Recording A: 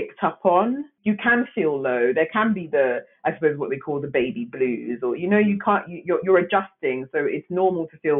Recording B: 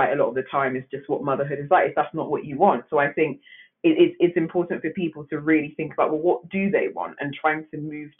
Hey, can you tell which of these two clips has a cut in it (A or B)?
A